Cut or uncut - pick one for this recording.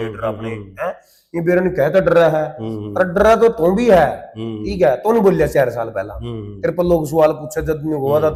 uncut